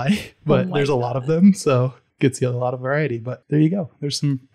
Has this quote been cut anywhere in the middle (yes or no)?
yes